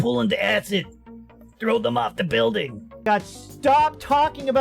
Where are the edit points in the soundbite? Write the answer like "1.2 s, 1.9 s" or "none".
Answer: 3.0 s

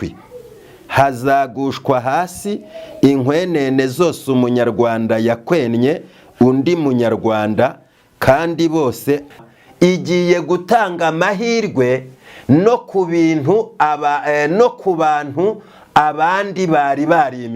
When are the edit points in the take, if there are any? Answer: 9.2 s

